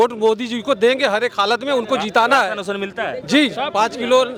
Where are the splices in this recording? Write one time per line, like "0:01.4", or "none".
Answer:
none

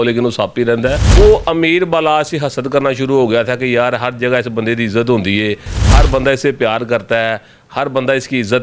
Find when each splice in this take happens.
0:01.0

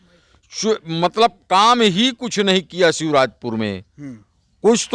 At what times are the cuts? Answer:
none

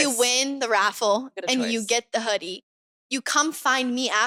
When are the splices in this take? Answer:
none

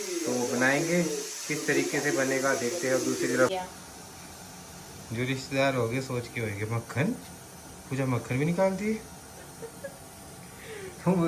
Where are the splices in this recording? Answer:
0:03.5
0:10.2

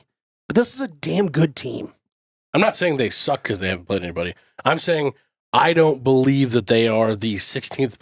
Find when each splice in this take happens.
0:02.3

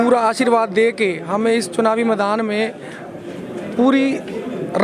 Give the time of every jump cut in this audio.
none

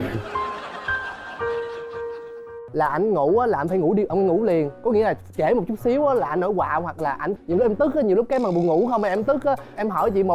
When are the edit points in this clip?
0:02.6
0:07.3

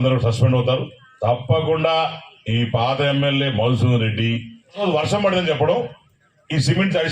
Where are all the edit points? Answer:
0:01.0
0:04.8

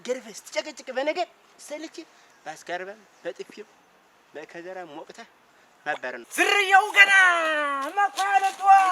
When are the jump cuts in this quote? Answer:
0:06.3

